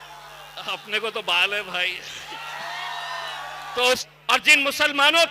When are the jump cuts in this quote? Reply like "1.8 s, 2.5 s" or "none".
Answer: 4.1 s